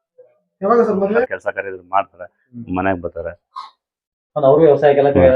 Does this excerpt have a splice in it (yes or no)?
yes